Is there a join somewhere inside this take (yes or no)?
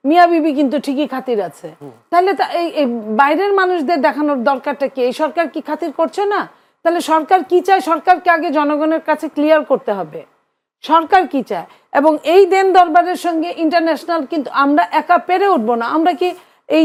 no